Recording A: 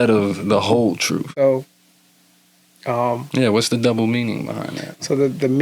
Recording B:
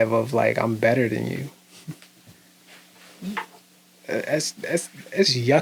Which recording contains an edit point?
A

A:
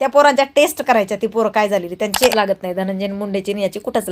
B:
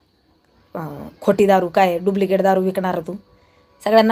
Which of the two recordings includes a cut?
A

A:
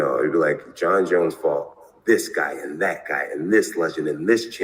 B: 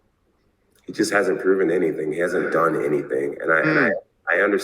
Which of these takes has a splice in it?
B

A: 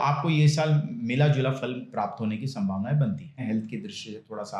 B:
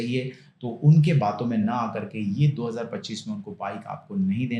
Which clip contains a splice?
A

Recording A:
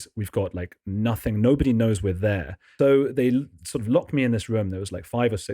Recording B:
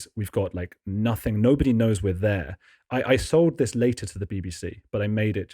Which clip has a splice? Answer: A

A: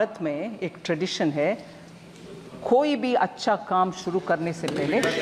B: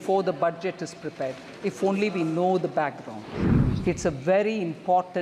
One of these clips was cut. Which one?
B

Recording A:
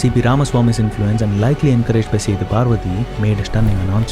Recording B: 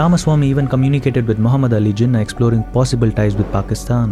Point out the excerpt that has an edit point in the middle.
A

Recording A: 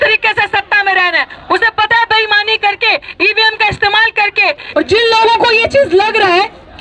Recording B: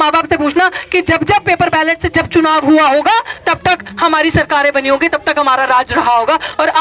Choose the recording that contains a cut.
A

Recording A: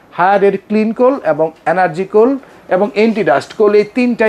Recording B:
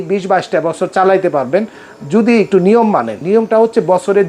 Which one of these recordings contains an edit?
B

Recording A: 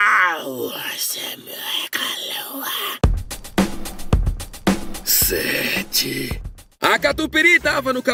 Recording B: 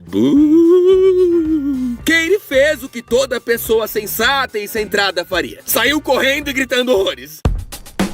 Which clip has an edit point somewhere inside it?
B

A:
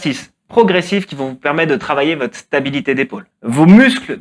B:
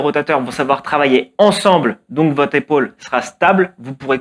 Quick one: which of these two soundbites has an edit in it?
A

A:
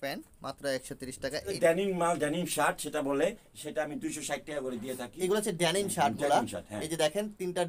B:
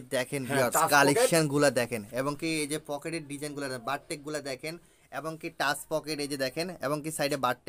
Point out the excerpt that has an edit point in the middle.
A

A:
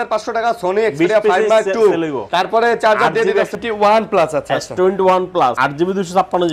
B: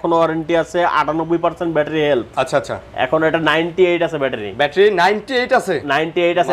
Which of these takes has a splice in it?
A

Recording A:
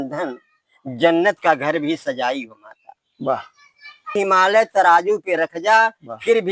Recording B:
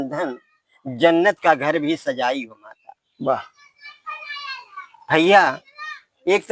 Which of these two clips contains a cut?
A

